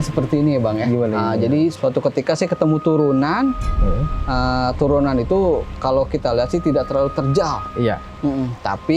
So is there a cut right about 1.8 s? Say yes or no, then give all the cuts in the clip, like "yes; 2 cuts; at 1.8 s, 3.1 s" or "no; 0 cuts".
yes; 1 cut; at 1.8 s